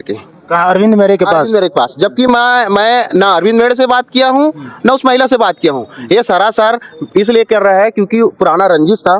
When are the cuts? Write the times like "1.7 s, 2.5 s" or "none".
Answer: none